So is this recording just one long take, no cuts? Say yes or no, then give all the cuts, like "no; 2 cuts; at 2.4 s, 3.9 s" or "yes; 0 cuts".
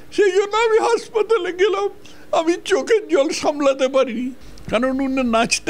no; 1 cut; at 4.4 s